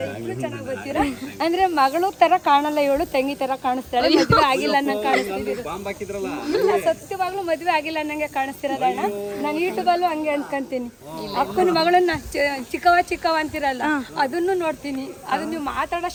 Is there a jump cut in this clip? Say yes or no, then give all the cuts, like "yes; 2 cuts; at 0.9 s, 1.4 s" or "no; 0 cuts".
no; 0 cuts